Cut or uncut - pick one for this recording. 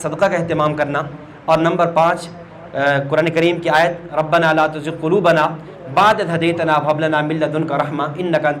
uncut